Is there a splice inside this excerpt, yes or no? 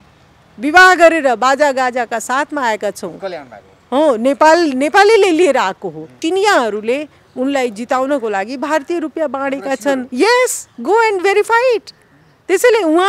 yes